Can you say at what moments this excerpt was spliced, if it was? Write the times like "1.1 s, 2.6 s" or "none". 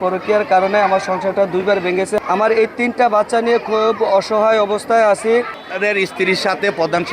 2.2 s, 5.6 s